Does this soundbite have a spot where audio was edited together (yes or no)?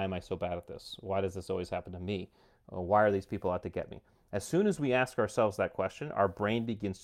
no